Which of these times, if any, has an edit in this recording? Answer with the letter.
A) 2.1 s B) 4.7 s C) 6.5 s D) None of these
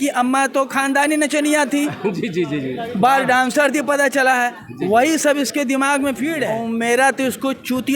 C